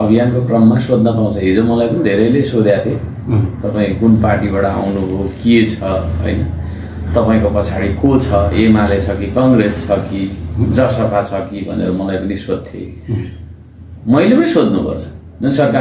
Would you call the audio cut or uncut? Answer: uncut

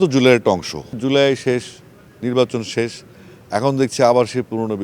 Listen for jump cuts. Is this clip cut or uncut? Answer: cut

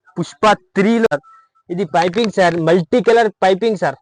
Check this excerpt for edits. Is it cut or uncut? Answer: cut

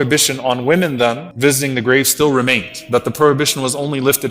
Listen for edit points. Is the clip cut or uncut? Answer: cut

